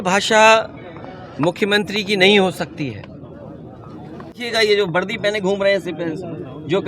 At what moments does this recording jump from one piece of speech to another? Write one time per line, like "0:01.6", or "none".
0:04.3